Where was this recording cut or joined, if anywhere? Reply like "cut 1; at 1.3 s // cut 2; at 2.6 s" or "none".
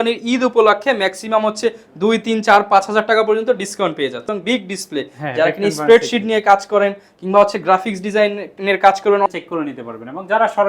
cut 1; at 4.4 s // cut 2; at 9.3 s